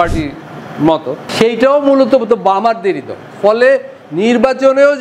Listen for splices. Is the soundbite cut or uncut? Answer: cut